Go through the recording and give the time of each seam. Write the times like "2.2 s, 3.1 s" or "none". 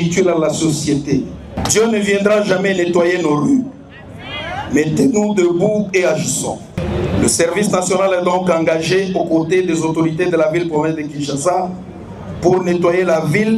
1.6 s, 6.7 s